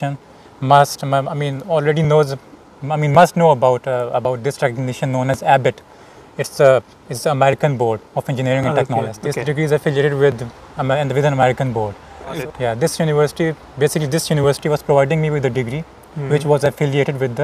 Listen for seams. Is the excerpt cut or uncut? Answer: cut